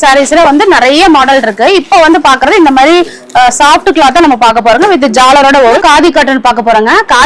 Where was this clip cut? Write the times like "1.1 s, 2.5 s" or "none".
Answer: 5.8 s